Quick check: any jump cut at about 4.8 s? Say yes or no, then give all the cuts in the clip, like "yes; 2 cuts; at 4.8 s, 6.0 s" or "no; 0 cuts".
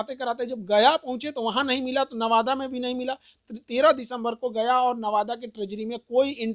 no; 0 cuts